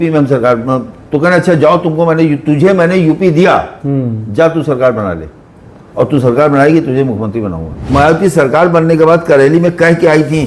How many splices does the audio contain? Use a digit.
1